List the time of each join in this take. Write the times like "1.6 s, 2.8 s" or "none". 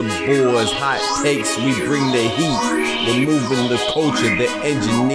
none